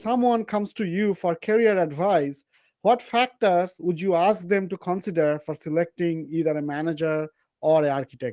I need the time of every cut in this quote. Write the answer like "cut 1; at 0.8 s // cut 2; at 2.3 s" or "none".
none